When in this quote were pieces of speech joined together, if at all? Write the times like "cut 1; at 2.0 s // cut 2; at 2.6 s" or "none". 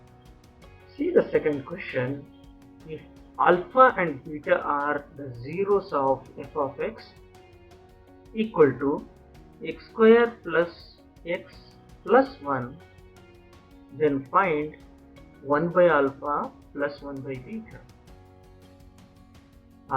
cut 1; at 1.0 s